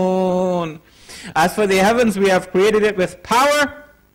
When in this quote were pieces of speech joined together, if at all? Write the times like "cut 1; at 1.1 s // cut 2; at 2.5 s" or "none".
cut 1; at 1.5 s

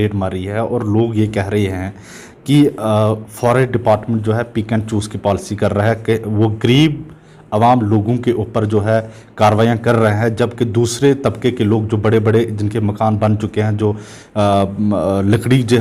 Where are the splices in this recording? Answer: none

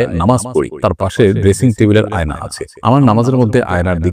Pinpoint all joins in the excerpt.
none

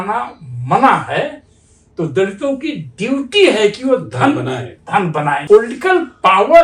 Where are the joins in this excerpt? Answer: cut 1; at 5.4 s

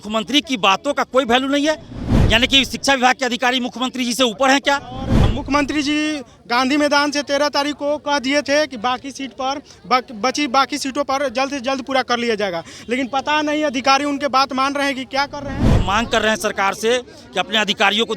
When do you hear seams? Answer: cut 1; at 5.2 s // cut 2; at 15.7 s

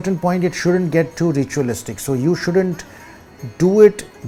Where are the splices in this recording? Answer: none

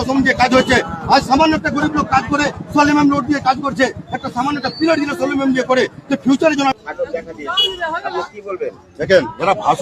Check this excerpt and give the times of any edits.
cut 1; at 6.7 s

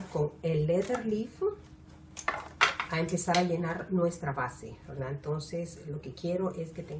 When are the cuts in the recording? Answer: cut 1; at 3.2 s

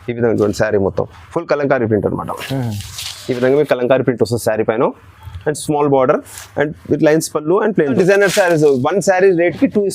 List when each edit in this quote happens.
cut 1; at 7.9 s

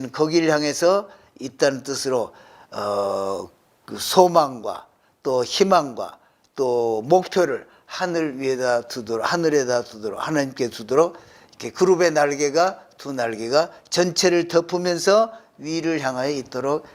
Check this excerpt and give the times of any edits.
none

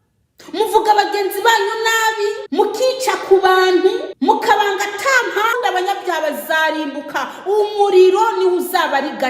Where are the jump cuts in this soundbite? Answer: cut 1; at 2.4 s // cut 2; at 4.1 s // cut 3; at 5.5 s

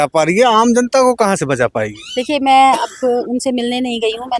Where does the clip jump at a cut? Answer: none

